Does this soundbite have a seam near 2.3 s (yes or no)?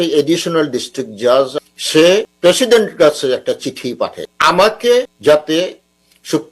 yes